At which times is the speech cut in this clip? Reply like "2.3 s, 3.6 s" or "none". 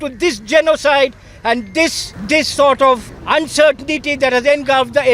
2.1 s, 3.1 s